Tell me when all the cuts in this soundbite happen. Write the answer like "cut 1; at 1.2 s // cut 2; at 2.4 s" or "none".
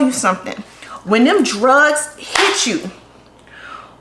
none